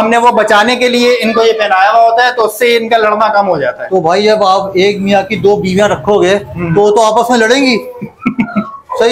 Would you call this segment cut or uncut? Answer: uncut